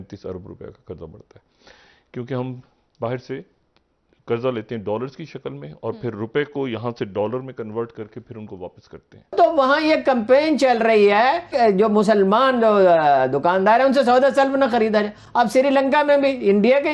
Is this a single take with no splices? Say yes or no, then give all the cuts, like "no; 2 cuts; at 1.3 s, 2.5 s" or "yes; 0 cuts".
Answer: no; 1 cut; at 9.3 s